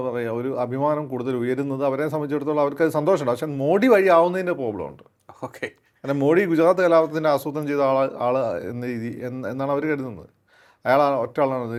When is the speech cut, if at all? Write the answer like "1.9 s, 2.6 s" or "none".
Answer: none